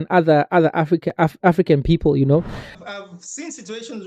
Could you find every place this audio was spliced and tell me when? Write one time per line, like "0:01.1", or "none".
0:02.6